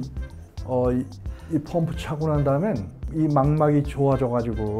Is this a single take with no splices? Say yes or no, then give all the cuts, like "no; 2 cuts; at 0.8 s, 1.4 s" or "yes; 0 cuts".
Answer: no; 1 cut; at 3.0 s